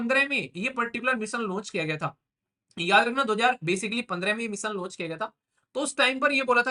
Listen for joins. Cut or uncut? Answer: uncut